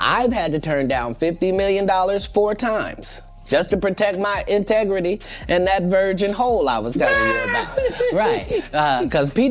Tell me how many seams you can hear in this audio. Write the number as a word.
zero